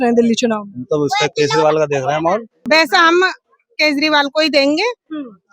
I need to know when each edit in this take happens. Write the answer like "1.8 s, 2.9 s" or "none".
2.5 s